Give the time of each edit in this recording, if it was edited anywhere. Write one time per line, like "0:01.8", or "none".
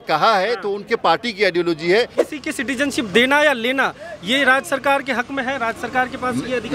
0:02.2